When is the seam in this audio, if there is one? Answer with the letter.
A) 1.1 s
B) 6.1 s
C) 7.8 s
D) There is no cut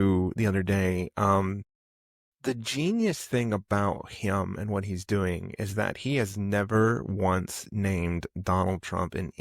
D